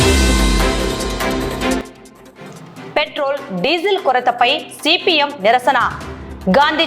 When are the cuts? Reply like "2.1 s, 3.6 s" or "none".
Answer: 1.8 s